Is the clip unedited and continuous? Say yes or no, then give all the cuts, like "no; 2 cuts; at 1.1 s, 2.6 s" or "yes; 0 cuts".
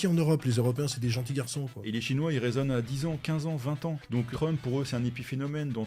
no; 2 cuts; at 1.8 s, 4.2 s